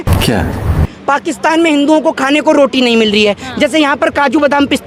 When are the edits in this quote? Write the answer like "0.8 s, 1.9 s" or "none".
none